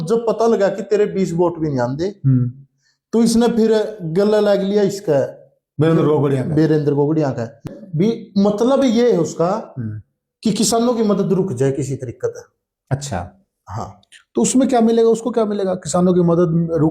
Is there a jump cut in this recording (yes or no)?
yes